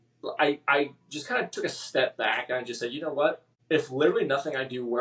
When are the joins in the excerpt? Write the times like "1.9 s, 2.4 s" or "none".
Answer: 3.5 s